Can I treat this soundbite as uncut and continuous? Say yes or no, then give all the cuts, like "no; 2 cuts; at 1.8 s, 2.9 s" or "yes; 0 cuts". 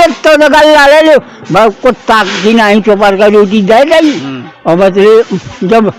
yes; 0 cuts